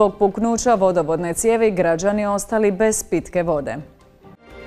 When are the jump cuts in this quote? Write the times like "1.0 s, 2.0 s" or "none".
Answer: none